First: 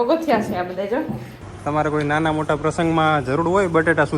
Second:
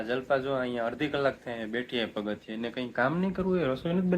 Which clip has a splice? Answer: first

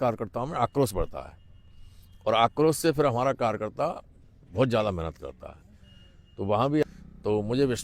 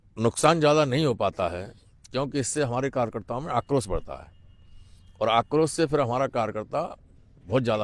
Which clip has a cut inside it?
first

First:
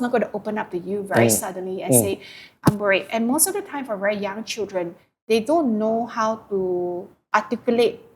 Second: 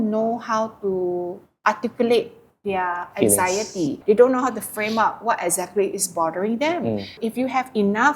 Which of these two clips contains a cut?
second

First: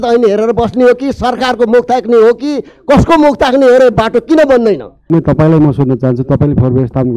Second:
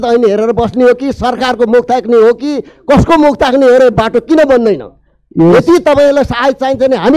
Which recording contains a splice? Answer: first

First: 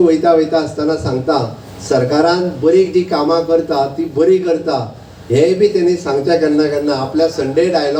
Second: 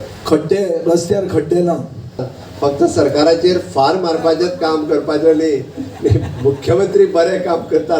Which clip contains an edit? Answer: second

